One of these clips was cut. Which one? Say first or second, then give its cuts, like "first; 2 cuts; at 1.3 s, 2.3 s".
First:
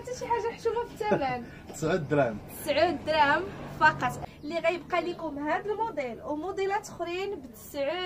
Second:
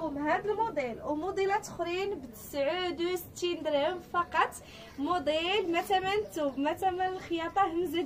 first; 1 cut; at 4.2 s